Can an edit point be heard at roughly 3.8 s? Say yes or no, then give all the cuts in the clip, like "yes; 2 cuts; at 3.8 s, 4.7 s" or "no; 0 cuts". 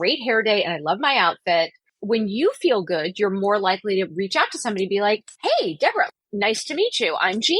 no; 3 cuts; at 1.9 s, 5.3 s, 6.1 s